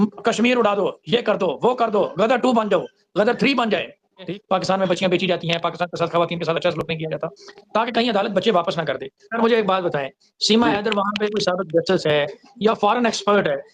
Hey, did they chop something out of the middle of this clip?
yes; 2 cuts; at 4.2 s, 9.2 s

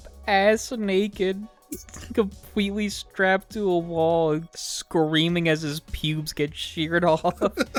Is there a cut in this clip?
no; 0 cuts

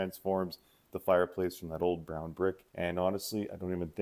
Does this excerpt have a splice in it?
yes; 1 cut; at 2.7 s

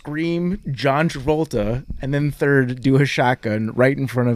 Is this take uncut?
yes; 0 cuts

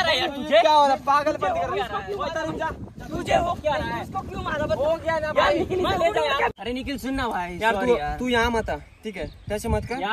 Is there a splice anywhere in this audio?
yes; 1 cut; at 6.6 s

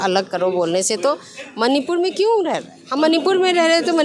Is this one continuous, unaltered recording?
no; 1 cut; at 2.8 s

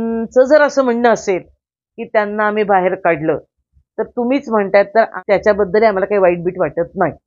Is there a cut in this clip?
yes; 1 cut; at 5.2 s

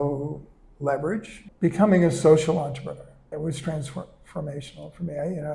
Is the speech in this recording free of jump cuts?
no; 2 cuts; at 1.4 s, 3.3 s

